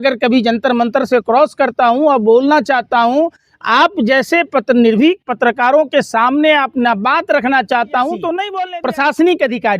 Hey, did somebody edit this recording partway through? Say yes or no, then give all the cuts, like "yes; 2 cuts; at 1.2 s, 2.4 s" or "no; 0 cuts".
yes; 1 cut; at 8.5 s